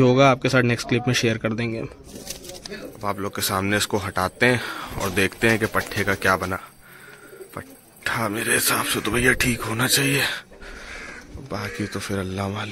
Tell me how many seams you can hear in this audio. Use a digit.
1